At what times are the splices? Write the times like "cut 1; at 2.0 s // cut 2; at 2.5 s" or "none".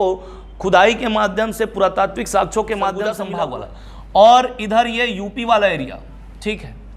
cut 1; at 3.3 s